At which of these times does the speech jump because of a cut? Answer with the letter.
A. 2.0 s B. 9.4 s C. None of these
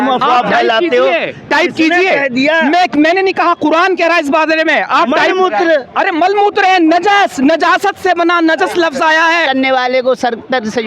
B